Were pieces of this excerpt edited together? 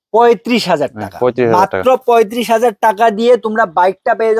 no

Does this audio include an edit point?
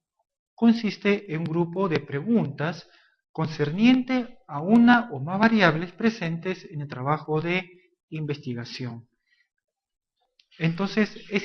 yes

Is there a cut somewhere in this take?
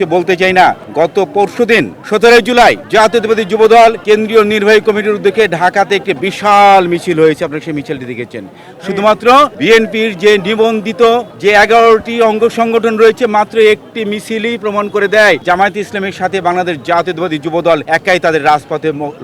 yes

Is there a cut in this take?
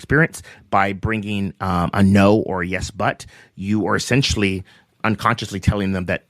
yes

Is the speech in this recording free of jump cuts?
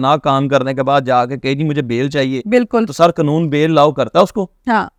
yes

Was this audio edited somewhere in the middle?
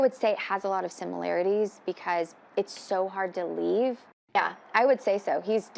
yes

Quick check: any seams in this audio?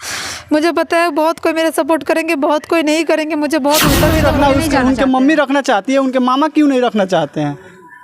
yes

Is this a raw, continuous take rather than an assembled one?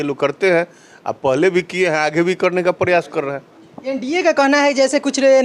yes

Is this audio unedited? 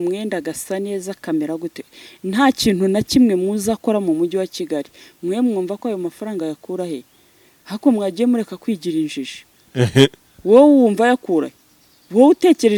yes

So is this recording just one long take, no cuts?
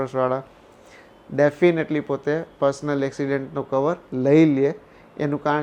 yes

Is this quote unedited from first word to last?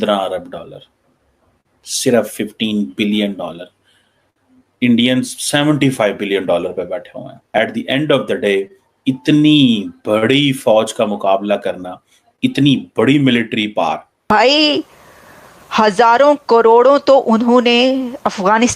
no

